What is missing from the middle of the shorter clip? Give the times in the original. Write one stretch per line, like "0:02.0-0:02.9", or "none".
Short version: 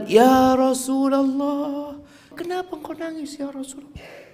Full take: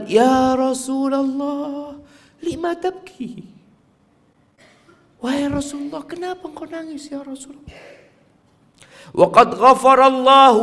0:02.3-0:06.1